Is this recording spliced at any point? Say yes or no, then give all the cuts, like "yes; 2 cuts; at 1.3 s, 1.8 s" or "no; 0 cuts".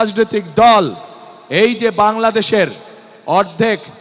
no; 0 cuts